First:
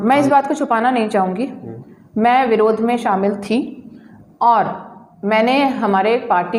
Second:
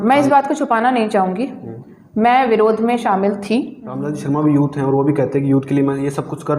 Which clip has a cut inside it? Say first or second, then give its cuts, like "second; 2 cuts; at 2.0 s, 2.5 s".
second; 1 cut; at 4.1 s